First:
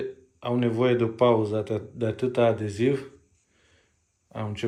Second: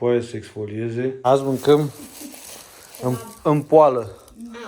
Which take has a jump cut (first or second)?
second